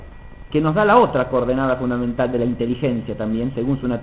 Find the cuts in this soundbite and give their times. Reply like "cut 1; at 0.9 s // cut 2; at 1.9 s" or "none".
cut 1; at 1.5 s